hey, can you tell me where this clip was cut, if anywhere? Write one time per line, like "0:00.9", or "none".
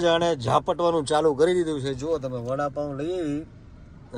none